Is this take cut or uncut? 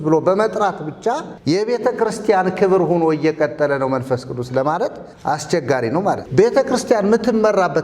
cut